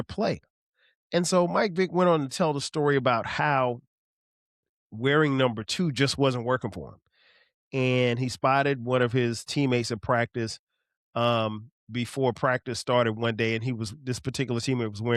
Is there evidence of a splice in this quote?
no; 0 cuts

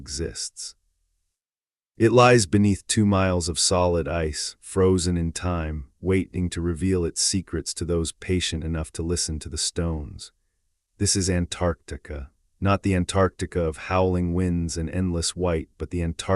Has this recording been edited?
no; 0 cuts

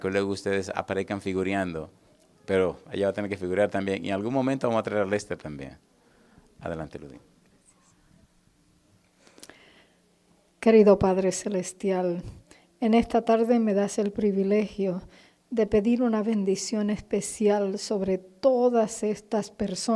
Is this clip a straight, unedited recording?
yes; 0 cuts

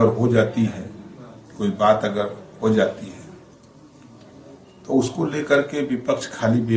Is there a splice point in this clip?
no; 0 cuts

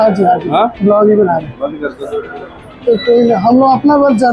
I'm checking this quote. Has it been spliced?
no; 0 cuts

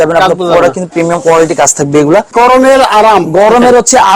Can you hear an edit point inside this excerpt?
yes; 1 cut; at 2.3 s

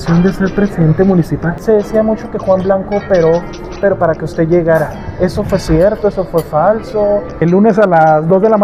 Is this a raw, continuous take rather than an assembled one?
no; 2 cuts; at 1.5 s, 7.3 s

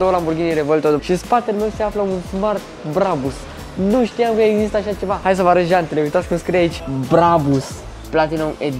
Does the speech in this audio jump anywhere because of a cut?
yes; 2 cuts; at 1.0 s, 5.2 s

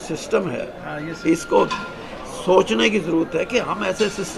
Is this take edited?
no; 0 cuts

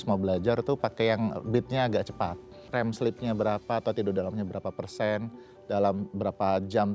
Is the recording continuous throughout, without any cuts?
no; 1 cut; at 2.6 s

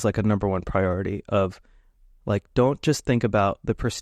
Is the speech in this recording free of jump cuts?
yes; 0 cuts

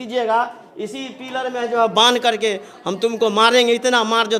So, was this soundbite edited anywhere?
no; 0 cuts

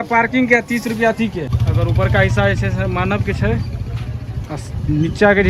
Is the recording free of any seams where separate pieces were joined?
no; 1 cut; at 1.6 s

